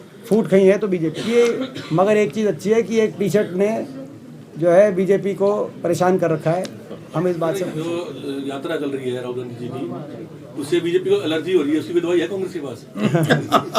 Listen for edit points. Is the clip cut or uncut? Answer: cut